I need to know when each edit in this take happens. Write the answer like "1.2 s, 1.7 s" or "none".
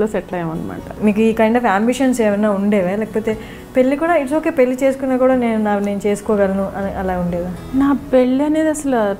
0.9 s